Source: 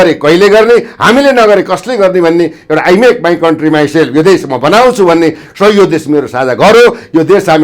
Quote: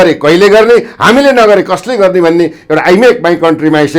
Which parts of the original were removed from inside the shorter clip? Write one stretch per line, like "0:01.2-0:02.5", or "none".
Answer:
none